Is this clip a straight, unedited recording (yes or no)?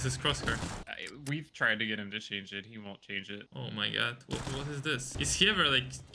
no